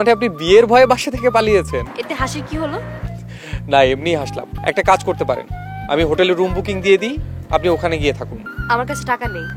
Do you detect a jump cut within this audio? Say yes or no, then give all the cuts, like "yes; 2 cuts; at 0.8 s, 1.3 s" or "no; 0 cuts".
no; 0 cuts